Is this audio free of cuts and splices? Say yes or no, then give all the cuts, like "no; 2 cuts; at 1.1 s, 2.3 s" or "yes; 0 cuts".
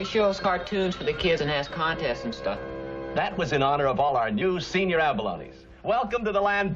yes; 0 cuts